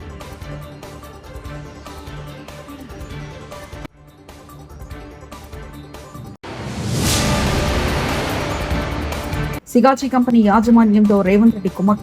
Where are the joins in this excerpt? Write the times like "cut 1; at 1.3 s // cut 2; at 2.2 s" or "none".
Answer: cut 1; at 9.5 s